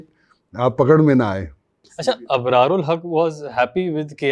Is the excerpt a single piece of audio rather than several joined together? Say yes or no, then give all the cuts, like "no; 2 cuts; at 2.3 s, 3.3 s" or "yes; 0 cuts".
no; 1 cut; at 1.9 s